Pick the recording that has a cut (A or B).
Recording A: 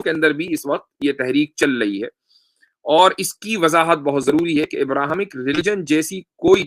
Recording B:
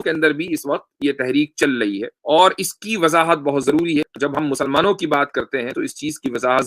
B